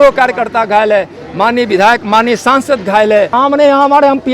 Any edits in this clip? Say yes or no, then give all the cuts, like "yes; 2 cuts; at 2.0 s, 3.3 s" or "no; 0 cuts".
yes; 1 cut; at 3.3 s